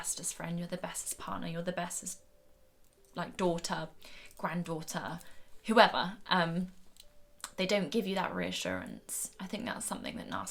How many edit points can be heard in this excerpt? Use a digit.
0